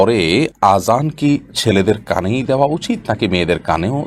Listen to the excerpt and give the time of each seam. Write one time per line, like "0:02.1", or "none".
none